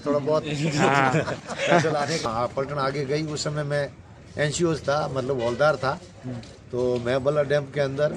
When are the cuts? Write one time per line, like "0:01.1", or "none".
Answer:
0:02.3